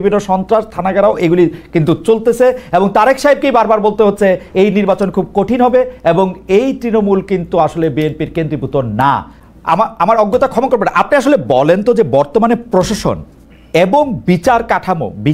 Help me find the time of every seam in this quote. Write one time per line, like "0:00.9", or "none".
0:09.4